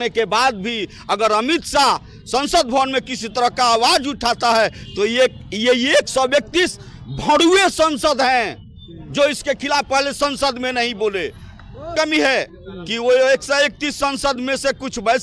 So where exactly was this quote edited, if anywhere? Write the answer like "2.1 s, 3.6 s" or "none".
11.9 s